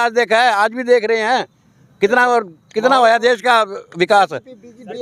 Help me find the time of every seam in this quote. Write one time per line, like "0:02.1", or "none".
none